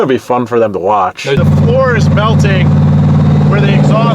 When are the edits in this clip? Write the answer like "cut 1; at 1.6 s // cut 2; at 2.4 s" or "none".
cut 1; at 1.4 s

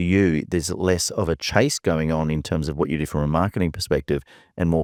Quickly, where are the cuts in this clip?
none

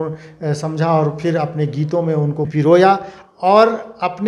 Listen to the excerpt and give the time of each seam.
cut 1; at 2.5 s

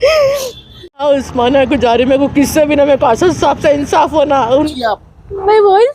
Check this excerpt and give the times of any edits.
cut 1; at 1.0 s // cut 2; at 4.7 s

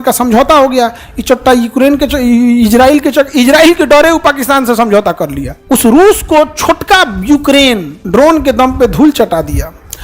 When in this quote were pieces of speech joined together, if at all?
cut 1; at 5.5 s // cut 2; at 7.9 s

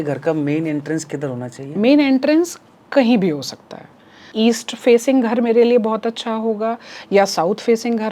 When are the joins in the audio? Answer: cut 1; at 4.3 s

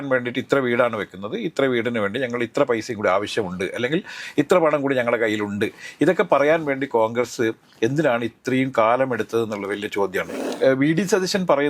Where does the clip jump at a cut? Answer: cut 1; at 10.4 s

